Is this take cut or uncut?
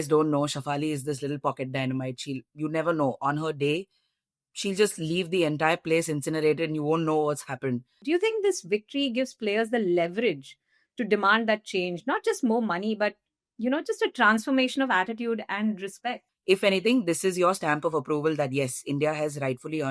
cut